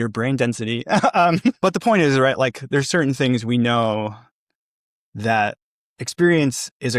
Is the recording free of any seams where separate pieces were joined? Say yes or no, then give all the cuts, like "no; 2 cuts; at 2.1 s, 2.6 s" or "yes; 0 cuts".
no; 1 cut; at 1.6 s